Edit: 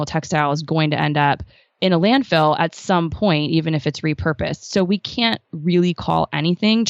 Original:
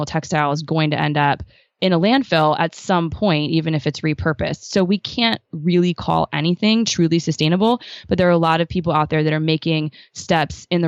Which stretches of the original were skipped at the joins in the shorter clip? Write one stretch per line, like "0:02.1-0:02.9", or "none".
none